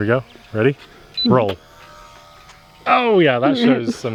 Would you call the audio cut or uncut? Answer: uncut